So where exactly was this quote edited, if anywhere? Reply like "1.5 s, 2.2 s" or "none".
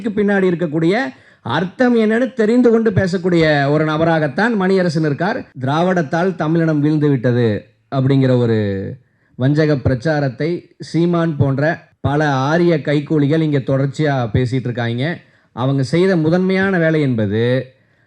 5.5 s, 11.9 s